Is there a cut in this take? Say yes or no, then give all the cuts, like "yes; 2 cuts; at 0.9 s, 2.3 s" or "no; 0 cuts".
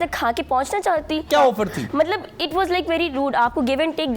yes; 1 cut; at 1.3 s